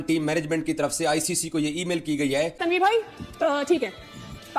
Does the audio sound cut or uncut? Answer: cut